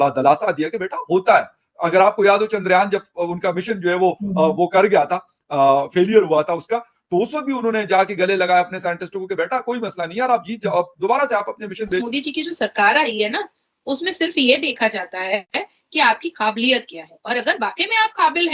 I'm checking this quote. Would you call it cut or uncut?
cut